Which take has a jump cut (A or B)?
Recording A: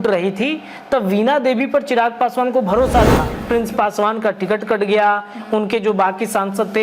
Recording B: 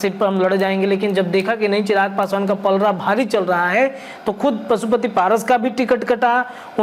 A